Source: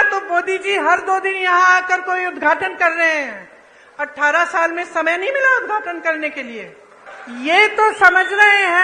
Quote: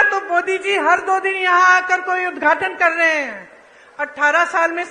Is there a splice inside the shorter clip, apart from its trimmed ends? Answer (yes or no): no